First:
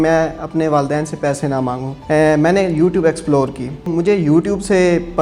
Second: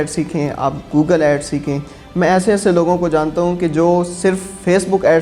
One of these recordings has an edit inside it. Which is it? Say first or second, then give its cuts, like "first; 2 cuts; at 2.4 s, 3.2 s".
first; 2 cuts; at 1.9 s, 3.9 s